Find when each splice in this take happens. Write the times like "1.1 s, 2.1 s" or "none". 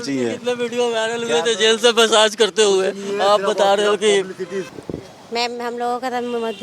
4.7 s